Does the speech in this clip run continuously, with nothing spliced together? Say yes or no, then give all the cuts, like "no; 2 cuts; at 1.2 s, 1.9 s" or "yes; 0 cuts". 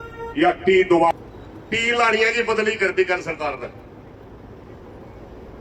no; 1 cut; at 1.1 s